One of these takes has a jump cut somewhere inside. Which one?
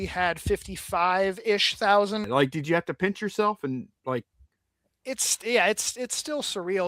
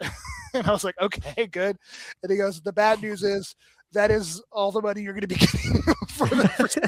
first; 1 cut; at 2.2 s

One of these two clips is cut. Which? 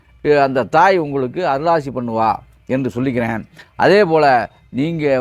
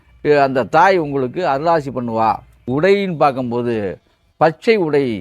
second; 1 cut; at 2.6 s

